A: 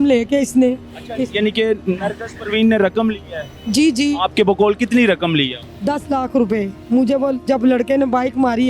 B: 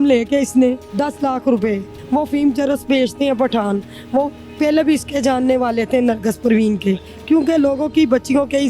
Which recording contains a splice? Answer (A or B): B